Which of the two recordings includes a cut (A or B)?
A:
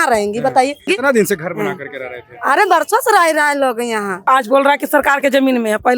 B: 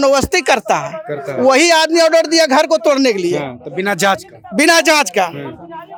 A